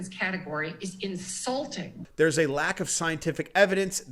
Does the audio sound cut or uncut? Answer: cut